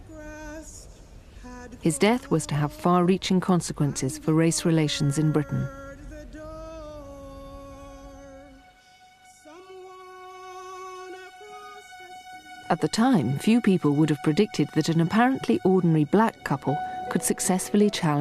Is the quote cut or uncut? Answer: cut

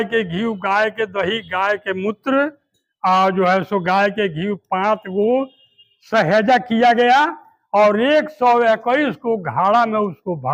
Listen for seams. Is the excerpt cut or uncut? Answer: uncut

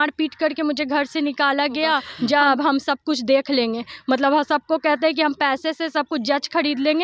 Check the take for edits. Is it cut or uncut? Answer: cut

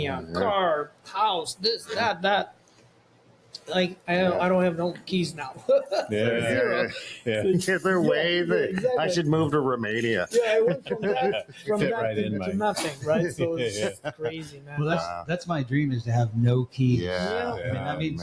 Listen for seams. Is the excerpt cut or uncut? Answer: uncut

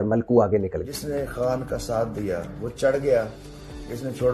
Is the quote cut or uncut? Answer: cut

